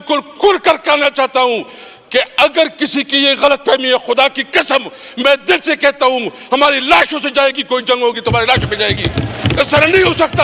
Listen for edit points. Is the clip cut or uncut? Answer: uncut